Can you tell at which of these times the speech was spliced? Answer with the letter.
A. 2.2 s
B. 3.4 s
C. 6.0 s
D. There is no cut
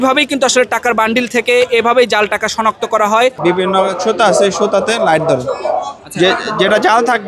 B